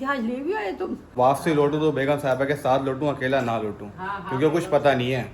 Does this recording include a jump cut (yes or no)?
yes